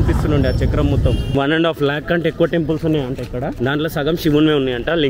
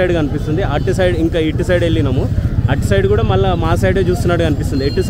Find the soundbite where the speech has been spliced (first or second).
first